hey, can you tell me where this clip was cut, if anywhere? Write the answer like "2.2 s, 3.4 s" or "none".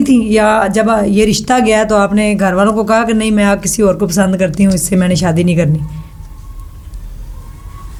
none